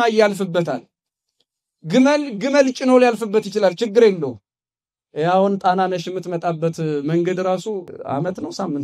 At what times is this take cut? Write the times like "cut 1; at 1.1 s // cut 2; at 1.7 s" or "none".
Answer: cut 1; at 7.9 s